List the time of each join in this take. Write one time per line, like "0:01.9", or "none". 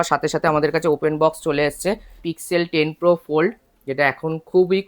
0:02.1